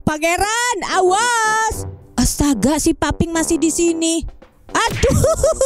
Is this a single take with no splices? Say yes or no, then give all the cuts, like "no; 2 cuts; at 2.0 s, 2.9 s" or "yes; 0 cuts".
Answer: yes; 0 cuts